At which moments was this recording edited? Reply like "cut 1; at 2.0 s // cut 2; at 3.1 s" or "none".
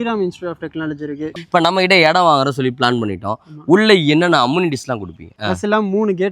cut 1; at 1.3 s // cut 2; at 5.3 s